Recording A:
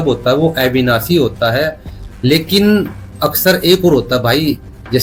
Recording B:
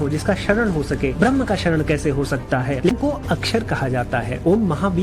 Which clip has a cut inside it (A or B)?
B